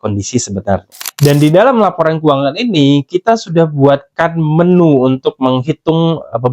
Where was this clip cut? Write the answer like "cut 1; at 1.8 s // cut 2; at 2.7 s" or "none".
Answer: cut 1; at 1.0 s